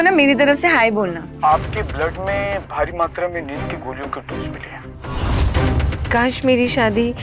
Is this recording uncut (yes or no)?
no